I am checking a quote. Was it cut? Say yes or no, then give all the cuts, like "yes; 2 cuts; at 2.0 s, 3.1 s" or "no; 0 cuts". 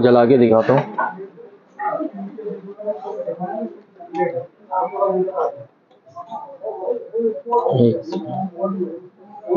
no; 0 cuts